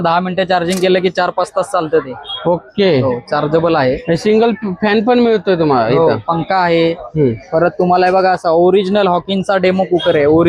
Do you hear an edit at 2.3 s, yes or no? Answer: no